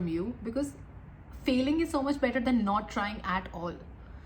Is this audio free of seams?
yes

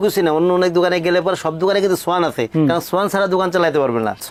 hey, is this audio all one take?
yes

